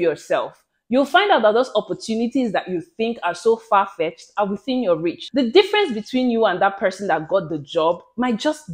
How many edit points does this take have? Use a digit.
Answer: 1